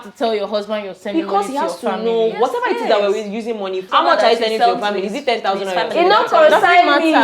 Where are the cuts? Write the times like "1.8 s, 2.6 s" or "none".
3.8 s